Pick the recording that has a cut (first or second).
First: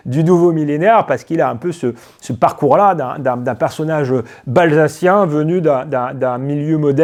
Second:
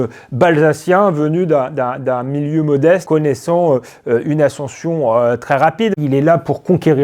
second